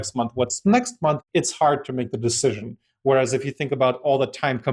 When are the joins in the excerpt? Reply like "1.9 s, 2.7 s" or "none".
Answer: 1.2 s